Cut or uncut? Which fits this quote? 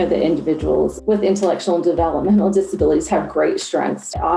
uncut